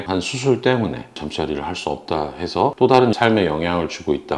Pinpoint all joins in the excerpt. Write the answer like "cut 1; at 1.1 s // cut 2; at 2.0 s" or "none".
cut 1; at 1.1 s // cut 2; at 2.7 s